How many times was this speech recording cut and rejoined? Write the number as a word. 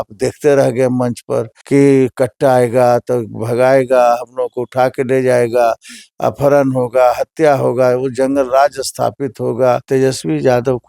two